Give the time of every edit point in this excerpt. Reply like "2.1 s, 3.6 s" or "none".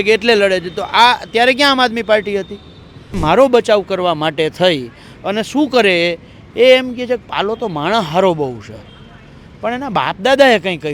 3.1 s